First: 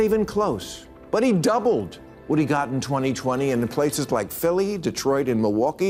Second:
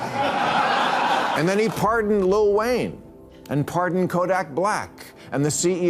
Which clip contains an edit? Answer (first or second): second